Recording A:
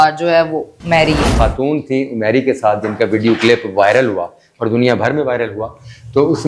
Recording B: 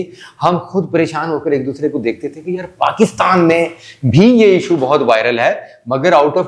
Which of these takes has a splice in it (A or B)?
A